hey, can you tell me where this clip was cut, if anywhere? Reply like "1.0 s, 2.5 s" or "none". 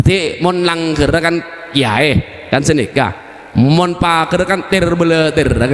none